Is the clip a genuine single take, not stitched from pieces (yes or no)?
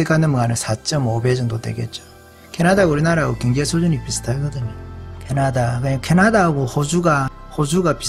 yes